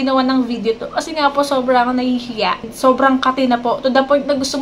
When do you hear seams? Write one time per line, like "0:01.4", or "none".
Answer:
0:02.6